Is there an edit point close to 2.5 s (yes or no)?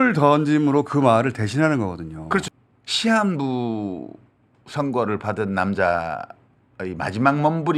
yes